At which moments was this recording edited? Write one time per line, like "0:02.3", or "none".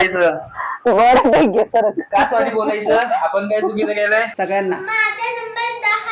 0:04.3